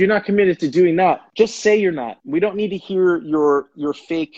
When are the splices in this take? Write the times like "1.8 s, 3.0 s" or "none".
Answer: 1.3 s, 2.1 s